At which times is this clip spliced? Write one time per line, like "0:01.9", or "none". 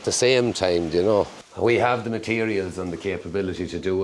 0:01.4

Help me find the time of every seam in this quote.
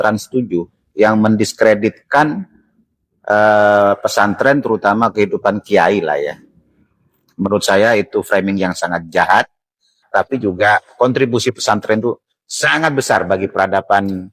0:10.0

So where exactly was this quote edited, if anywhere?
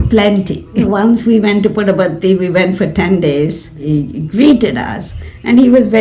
0:00.8
0:03.8

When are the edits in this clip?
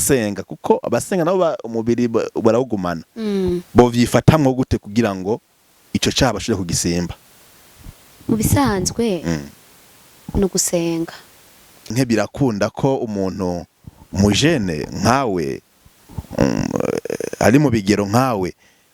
0:11.9

